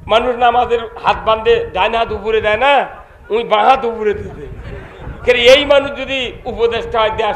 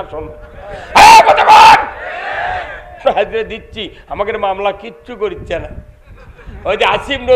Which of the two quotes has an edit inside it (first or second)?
second